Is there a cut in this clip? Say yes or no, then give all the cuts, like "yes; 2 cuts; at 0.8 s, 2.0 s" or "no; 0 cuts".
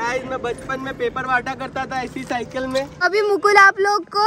yes; 1 cut; at 2.9 s